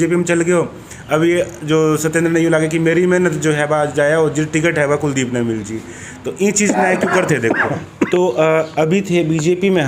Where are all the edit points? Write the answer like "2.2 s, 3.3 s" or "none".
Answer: 8.1 s